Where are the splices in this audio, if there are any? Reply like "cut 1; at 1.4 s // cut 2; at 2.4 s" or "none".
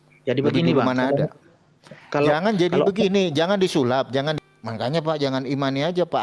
cut 1; at 4.3 s